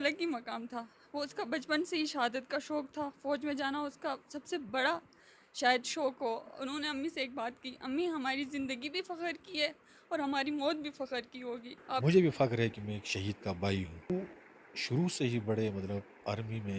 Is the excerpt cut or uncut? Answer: cut